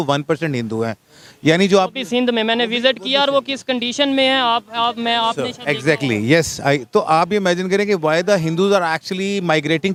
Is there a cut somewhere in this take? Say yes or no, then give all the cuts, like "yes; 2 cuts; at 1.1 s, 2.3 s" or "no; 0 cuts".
no; 0 cuts